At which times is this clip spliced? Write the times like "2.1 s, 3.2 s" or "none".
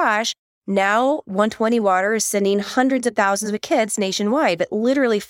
none